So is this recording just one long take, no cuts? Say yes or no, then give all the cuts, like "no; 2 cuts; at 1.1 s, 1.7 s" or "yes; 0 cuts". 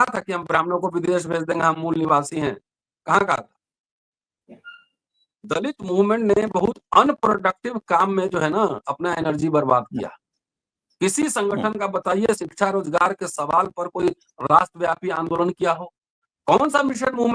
yes; 0 cuts